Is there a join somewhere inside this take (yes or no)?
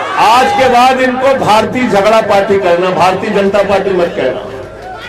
no